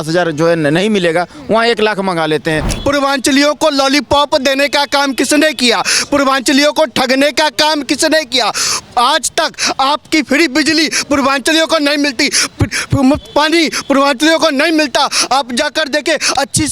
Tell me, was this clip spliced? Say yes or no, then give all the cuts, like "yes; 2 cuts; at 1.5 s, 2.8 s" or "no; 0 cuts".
yes; 1 cut; at 2.7 s